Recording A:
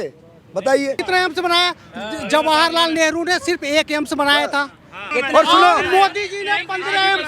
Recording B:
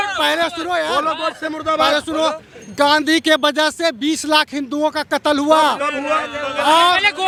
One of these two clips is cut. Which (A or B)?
A